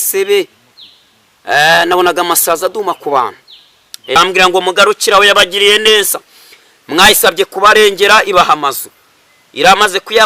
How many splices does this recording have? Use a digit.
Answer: 1